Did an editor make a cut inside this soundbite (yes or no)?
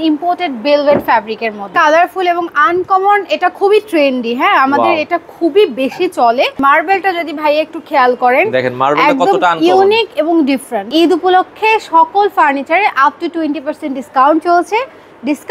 yes